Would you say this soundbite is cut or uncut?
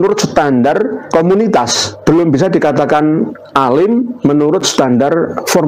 cut